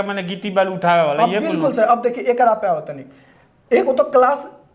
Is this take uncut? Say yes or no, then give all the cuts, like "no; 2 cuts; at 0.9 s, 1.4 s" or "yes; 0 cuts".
yes; 0 cuts